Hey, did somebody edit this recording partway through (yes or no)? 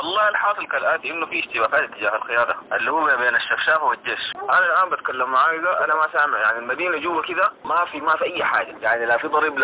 yes